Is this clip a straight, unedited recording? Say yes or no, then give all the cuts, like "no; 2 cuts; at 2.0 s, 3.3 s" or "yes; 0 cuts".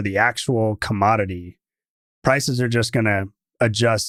yes; 0 cuts